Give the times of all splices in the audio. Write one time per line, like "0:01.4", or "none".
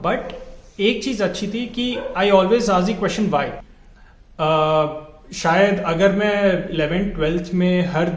0:03.6